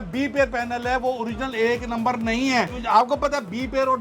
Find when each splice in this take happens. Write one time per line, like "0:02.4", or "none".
0:02.8